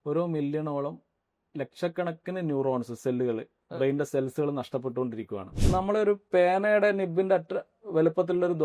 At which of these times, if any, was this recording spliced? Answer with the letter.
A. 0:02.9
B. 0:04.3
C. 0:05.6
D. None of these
C